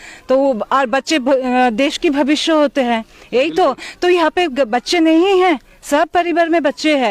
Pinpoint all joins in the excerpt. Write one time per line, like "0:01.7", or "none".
none